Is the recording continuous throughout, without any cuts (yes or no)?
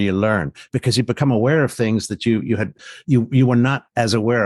no